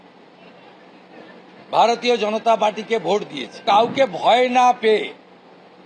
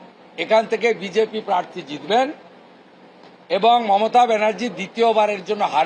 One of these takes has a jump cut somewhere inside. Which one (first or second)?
first